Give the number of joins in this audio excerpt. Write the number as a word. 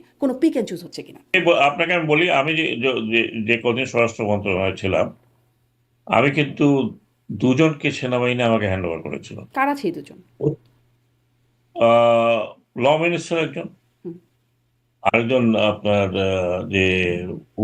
two